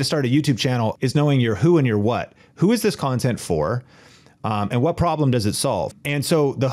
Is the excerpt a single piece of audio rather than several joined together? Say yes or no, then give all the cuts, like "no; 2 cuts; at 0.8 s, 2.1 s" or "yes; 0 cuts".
no; 2 cuts; at 1.0 s, 6.0 s